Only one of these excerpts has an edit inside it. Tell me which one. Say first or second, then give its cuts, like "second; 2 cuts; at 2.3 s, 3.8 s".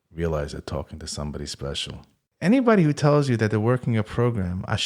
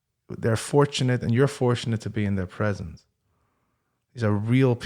first; 1 cut; at 2.2 s